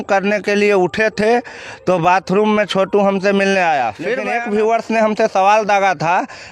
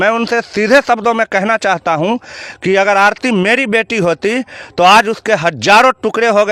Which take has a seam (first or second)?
first